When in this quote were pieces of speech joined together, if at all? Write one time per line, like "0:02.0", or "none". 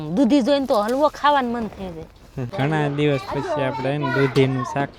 0:02.5